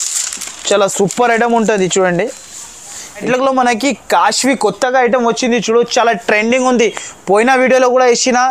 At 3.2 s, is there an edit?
yes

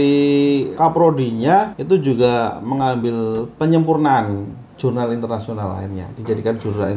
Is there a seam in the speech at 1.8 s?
yes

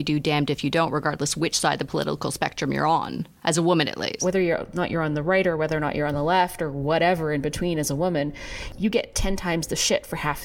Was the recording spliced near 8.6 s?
yes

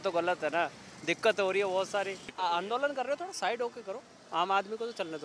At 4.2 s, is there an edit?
no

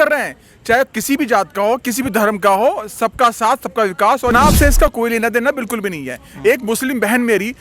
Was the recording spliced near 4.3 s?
yes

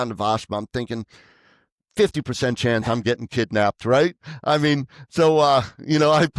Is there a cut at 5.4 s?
no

